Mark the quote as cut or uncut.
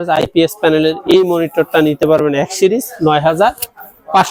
uncut